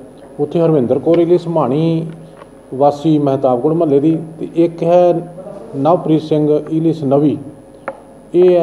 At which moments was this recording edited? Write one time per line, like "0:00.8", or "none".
none